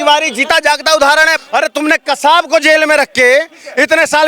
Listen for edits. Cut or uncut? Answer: cut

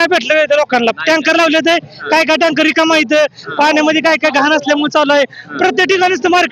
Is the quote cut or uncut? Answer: uncut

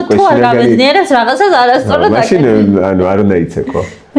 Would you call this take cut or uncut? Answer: uncut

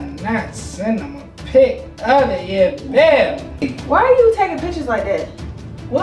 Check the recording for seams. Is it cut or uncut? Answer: cut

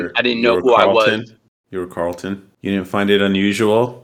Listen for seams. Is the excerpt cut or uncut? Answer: cut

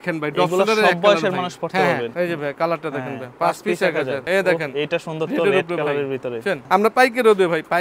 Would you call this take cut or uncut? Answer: cut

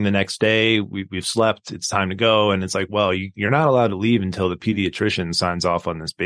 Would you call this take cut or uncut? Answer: uncut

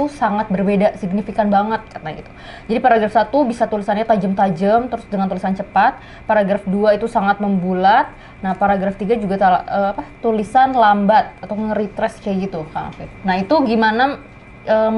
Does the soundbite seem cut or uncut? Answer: uncut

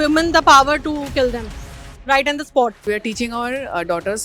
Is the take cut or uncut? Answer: cut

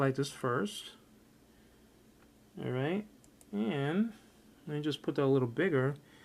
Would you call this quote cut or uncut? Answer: uncut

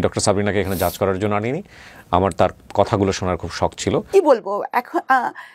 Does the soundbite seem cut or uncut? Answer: cut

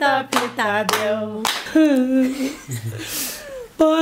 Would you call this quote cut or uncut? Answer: cut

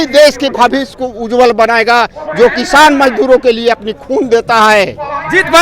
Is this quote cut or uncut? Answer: uncut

